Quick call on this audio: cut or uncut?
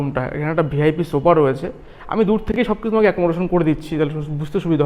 uncut